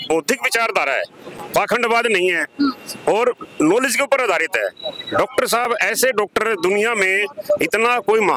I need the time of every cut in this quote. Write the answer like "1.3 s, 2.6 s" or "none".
none

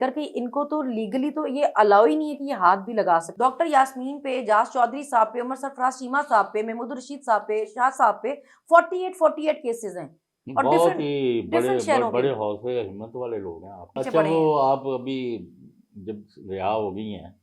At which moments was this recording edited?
3.3 s, 13.9 s

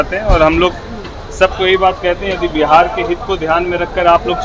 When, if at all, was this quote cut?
none

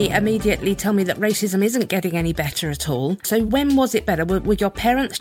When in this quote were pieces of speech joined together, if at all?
3.2 s

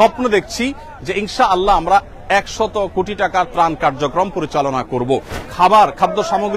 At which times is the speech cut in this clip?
5.4 s

